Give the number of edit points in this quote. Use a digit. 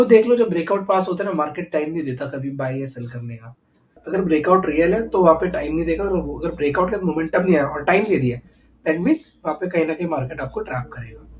1